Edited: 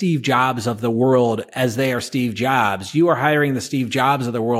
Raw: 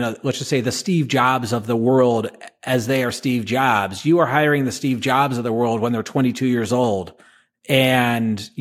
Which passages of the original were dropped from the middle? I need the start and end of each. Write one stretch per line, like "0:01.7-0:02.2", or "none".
0:02.3-0:02.6